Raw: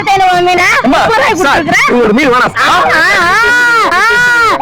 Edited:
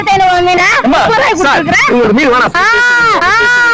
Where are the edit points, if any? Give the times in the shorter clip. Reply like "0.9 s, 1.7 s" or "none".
2.5 s